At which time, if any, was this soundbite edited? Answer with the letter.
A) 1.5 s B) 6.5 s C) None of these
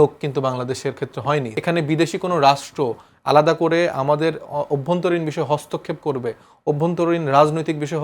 A